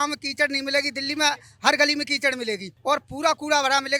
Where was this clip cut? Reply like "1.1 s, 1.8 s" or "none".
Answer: none